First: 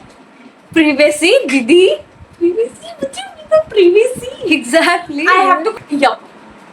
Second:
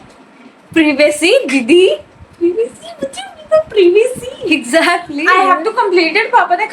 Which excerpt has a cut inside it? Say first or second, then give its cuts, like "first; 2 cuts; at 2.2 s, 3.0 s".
first; 1 cut; at 5.7 s